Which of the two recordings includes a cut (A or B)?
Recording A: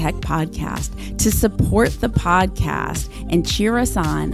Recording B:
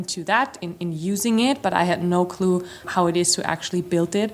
B